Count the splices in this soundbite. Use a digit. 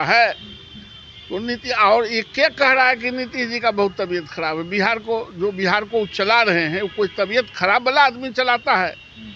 0